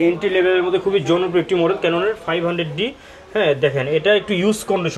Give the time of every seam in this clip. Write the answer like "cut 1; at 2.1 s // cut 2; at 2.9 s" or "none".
none